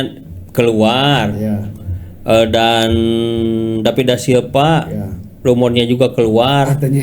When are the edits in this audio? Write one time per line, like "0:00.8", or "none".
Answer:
none

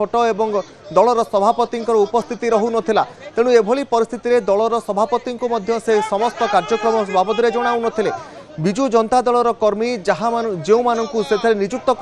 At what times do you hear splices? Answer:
0:01.2

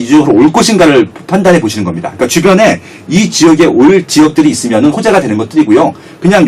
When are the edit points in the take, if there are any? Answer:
none

